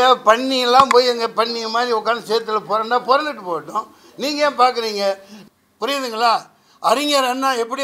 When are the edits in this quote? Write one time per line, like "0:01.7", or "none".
0:05.3